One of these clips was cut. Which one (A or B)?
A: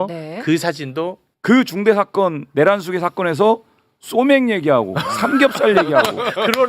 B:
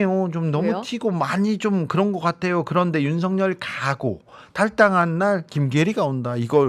A